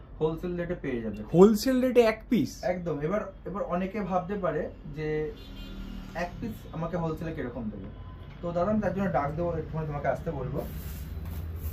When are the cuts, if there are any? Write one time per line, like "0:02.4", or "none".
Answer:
none